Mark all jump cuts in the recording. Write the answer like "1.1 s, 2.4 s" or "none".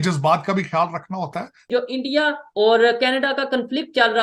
1.7 s